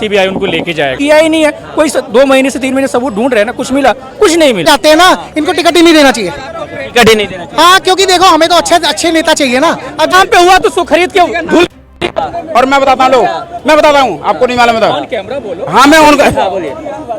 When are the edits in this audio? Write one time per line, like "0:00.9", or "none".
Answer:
0:01.0
0:04.6
0:10.1

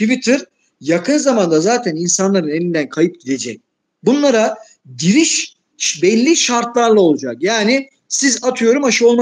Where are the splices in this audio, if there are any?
none

